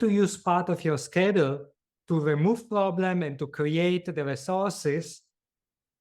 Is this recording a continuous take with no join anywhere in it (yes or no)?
yes